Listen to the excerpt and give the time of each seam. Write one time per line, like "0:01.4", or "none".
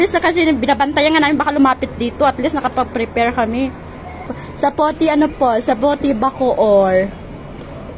0:04.3